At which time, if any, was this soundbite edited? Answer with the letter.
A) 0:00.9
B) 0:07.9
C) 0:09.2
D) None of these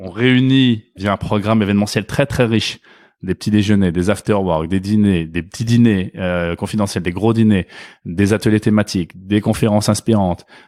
A